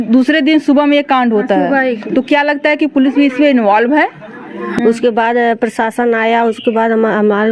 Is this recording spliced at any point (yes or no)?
yes